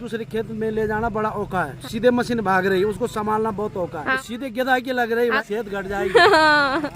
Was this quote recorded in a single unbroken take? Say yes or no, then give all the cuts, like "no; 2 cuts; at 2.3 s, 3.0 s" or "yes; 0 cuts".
no; 3 cuts; at 1.8 s, 4.1 s, 5.4 s